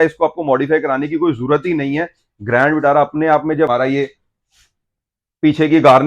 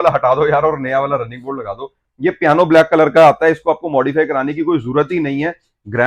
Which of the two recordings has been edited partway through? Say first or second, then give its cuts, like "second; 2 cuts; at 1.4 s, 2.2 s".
first; 1 cut; at 3.7 s